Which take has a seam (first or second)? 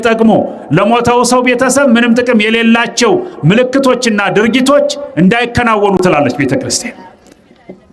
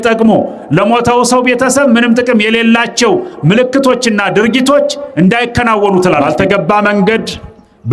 second